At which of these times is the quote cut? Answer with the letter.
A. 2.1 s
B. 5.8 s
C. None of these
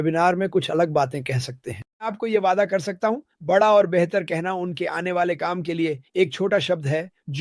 A